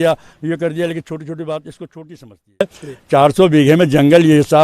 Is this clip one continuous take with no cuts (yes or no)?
no